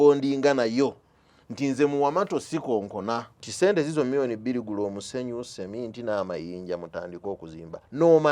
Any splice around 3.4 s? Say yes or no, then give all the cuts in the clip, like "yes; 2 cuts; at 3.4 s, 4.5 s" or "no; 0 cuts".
yes; 1 cut; at 3.4 s